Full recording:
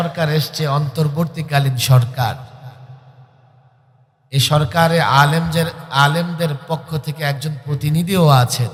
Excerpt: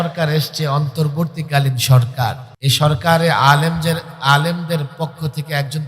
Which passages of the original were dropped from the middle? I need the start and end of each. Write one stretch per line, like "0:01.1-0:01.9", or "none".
0:02.5-0:04.2